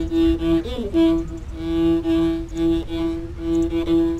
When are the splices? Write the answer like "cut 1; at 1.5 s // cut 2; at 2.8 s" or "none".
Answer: cut 1; at 1.0 s